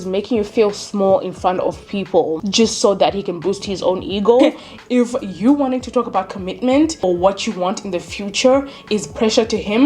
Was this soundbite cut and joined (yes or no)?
yes